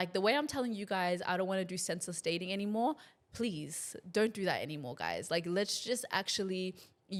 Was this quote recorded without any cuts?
yes; 0 cuts

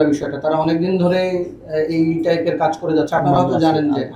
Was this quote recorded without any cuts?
yes; 0 cuts

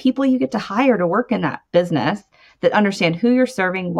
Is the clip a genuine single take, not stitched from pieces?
no; 1 cut; at 1.6 s

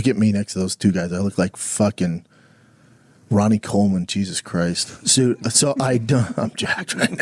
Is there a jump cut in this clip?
no; 0 cuts

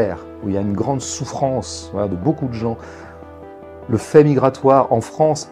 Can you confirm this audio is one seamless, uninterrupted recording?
yes; 0 cuts

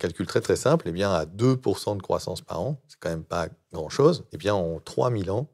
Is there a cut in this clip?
yes; 1 cut; at 4.3 s

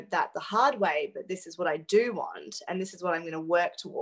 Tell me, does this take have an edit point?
no; 0 cuts

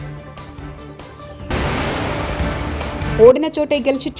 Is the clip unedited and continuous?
no; 2 cuts; at 1.2 s, 3.1 s

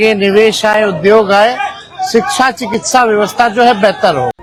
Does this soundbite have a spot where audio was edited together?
no; 0 cuts

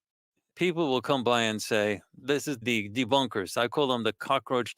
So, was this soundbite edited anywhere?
yes; 1 cut; at 2.6 s

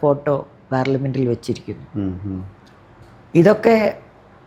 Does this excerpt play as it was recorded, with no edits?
yes; 0 cuts

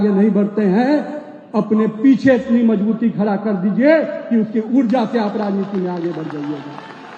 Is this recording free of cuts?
yes; 0 cuts

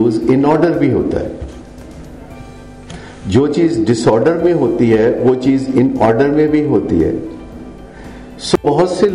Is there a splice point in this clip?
no; 0 cuts

